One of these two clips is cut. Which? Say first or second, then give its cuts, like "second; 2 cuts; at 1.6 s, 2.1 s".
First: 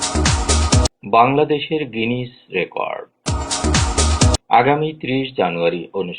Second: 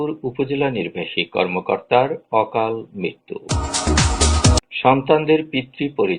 first; 1 cut; at 1.0 s